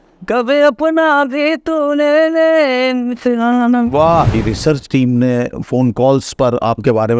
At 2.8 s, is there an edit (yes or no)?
no